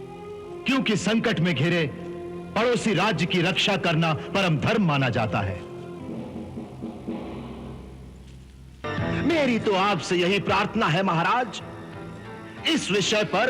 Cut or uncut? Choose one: cut